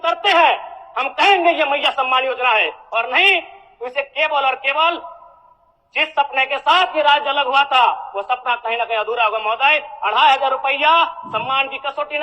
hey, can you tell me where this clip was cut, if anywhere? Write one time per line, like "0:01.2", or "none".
none

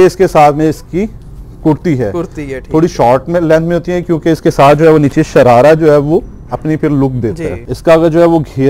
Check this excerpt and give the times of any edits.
0:07.6

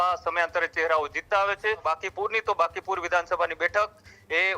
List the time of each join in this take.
0:01.8

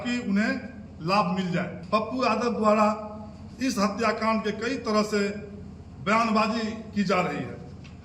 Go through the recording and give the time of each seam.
0:01.8

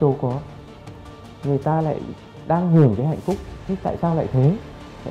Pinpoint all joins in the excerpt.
none

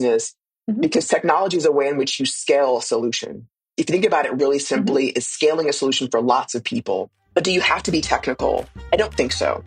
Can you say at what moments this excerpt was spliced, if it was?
0:07.2
0:08.7

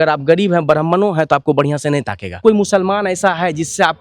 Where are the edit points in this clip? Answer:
0:02.4

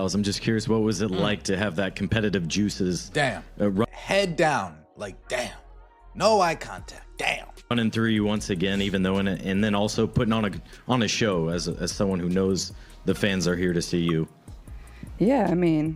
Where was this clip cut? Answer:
0:13.9

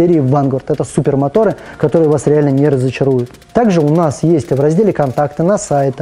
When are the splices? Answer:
0:03.4

